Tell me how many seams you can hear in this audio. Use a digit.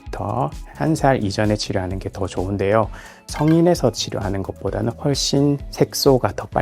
1